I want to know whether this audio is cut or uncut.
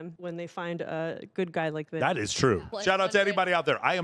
cut